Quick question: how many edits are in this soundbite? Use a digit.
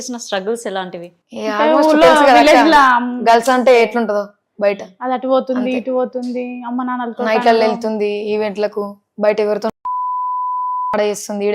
0